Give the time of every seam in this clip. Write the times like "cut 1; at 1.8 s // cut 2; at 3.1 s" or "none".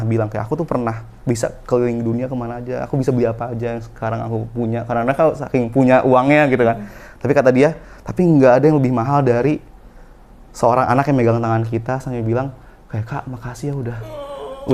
none